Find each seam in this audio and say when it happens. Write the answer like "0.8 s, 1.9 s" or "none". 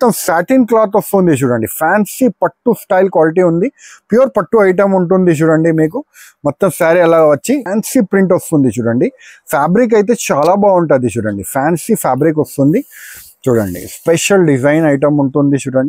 7.7 s